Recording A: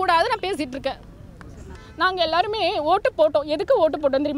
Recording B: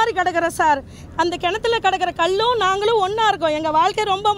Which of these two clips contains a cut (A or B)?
A